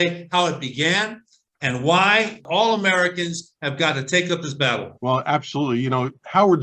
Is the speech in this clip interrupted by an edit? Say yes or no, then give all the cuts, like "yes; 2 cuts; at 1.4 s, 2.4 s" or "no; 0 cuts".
yes; 2 cuts; at 2.4 s, 4.9 s